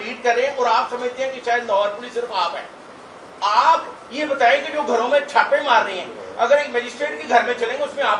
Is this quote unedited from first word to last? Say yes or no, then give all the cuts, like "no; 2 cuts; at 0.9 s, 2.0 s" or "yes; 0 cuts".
yes; 0 cuts